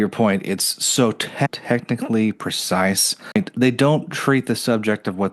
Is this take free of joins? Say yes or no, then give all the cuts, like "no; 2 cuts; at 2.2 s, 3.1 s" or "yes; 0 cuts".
no; 1 cut; at 3.3 s